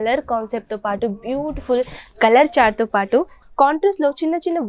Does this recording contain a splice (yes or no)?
yes